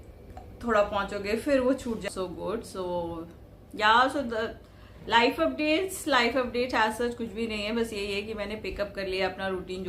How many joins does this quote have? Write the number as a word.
one